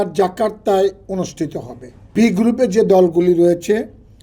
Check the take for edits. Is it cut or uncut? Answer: cut